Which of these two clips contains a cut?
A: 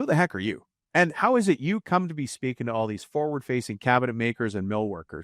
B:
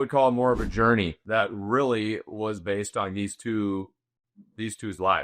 B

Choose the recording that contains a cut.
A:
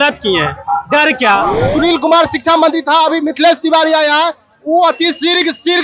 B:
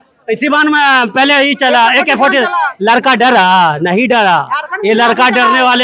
A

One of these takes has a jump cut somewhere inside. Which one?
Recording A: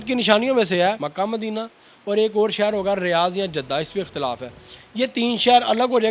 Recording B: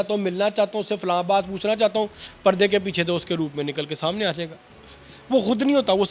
A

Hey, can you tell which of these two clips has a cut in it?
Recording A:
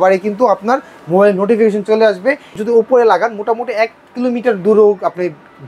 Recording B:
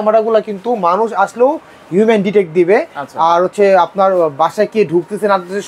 A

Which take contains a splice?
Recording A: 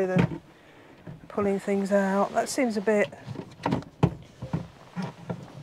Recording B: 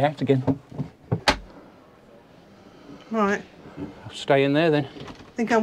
B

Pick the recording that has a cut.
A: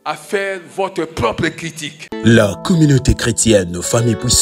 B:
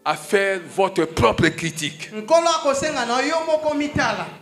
A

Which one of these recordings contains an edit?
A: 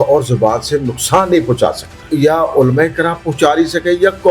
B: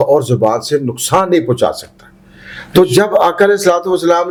A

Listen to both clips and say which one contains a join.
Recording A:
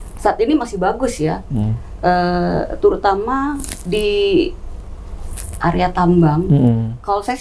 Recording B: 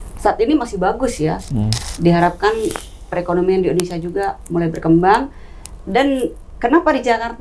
B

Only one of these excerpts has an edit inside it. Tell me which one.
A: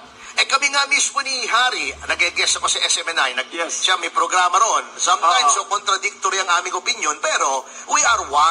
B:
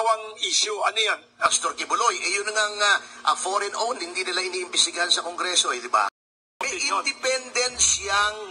B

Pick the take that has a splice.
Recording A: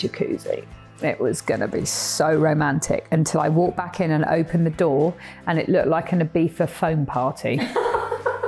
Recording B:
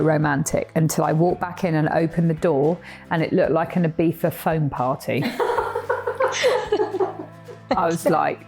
B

